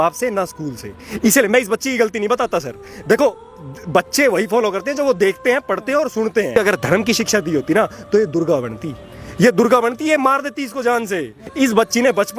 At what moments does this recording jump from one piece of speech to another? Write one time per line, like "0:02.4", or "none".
0:06.6
0:11.4